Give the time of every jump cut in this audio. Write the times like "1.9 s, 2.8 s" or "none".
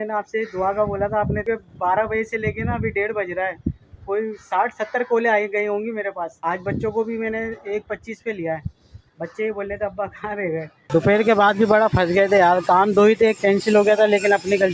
1.4 s, 6.3 s, 10.8 s